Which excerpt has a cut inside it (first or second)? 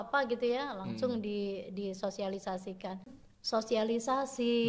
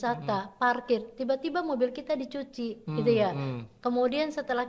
first